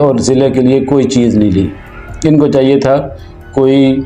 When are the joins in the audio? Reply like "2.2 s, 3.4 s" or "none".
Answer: none